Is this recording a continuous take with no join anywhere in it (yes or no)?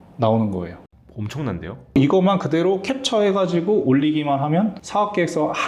no